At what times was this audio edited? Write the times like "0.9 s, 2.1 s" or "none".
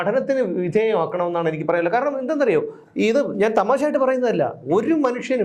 none